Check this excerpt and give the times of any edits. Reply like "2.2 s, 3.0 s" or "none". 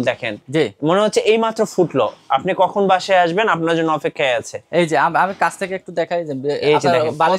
none